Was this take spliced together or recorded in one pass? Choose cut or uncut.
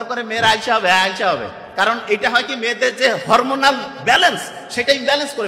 uncut